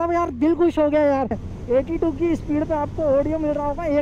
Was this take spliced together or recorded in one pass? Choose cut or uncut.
cut